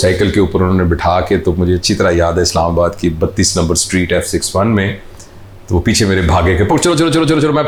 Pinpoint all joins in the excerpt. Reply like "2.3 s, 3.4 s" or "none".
none